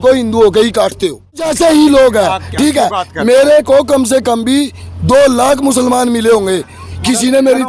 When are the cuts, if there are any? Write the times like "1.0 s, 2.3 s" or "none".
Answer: 1.4 s